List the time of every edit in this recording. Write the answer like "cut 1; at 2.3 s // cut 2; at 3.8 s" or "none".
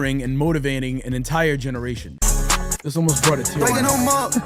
cut 1; at 2.1 s